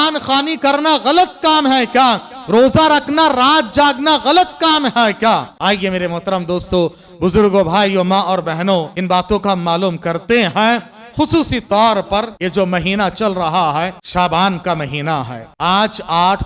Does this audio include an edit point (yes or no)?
yes